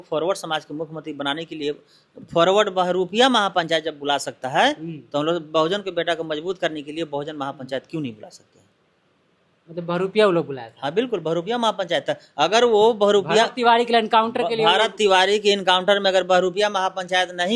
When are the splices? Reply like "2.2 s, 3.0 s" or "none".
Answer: none

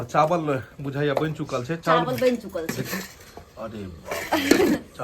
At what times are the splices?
none

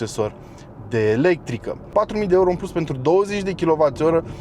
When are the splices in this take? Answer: 1.9 s

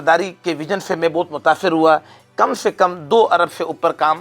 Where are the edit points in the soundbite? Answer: 2.2 s

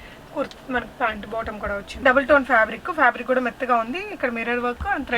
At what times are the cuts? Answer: 2.0 s

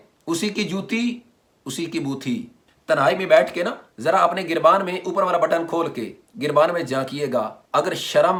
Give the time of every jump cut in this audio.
none

